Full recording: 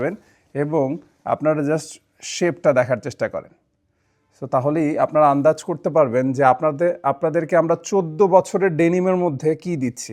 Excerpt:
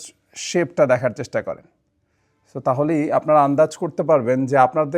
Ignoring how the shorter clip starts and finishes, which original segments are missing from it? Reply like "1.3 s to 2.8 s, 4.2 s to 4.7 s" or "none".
none